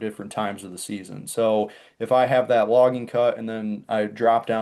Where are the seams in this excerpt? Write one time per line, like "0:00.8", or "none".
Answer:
none